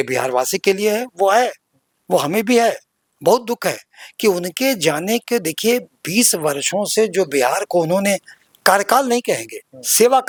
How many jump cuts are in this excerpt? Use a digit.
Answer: 0